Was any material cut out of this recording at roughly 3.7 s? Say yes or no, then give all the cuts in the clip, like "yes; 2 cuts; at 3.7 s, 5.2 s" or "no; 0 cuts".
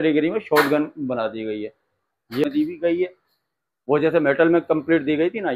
no; 1 cut; at 2.4 s